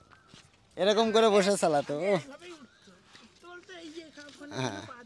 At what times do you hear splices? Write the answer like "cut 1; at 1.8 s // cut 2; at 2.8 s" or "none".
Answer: none